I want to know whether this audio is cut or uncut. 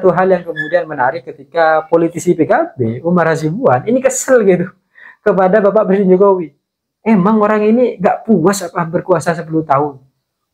uncut